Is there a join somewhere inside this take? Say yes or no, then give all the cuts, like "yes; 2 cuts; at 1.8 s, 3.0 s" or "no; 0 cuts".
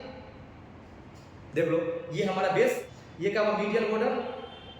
yes; 1 cut; at 2.9 s